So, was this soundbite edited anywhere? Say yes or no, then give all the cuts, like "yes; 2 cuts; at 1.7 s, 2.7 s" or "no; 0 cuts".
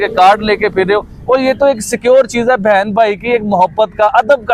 no; 0 cuts